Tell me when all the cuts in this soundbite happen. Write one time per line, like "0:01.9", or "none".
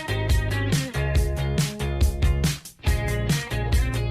0:01.3

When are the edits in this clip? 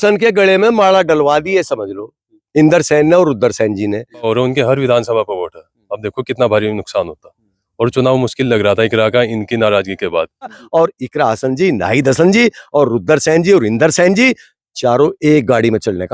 0:04.3
0:10.6

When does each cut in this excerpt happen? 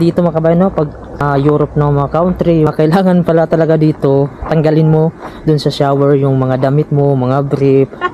0:01.2
0:02.7

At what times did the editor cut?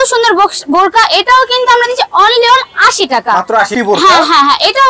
0:03.7

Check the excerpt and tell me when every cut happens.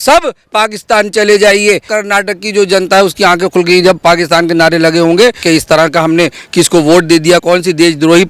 0:01.9
0:05.4
0:07.4

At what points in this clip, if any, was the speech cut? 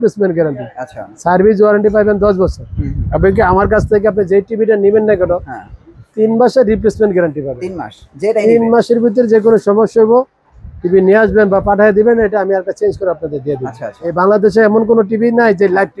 0:14.1

